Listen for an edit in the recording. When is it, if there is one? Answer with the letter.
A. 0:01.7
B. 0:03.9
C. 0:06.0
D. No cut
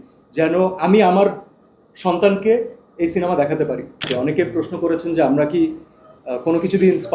B